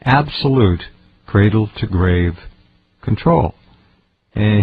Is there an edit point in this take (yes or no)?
no